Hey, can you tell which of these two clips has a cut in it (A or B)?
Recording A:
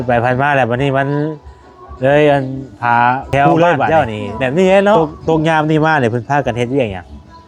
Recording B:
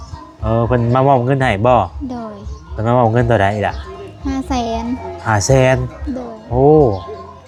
A